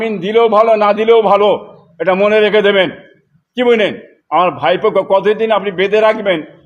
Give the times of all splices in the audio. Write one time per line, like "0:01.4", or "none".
none